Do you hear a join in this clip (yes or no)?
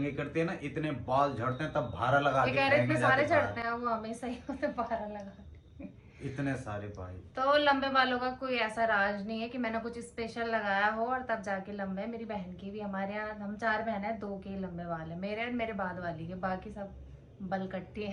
no